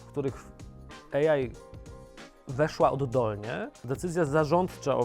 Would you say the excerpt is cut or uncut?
cut